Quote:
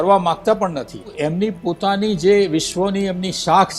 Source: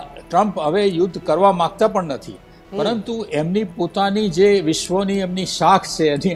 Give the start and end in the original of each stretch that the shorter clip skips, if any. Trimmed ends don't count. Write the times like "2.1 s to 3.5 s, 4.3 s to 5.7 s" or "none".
2.4 s to 3.2 s